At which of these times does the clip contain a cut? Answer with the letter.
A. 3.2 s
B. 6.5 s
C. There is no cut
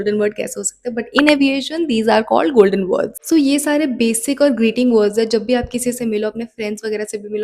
A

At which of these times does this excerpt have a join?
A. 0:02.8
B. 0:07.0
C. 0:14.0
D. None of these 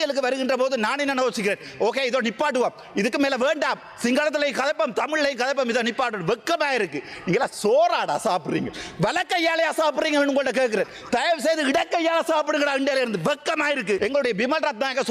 C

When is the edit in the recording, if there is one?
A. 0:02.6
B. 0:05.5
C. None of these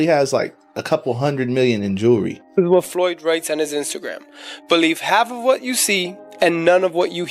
A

